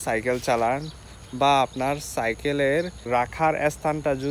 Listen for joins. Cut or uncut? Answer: cut